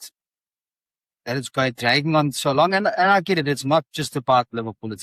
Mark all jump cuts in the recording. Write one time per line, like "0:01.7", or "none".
none